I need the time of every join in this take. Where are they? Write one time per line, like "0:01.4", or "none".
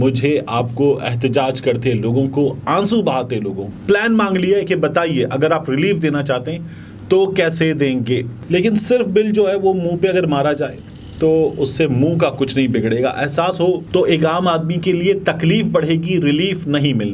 0:03.6
0:08.3
0:13.8